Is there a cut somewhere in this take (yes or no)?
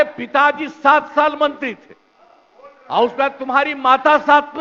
no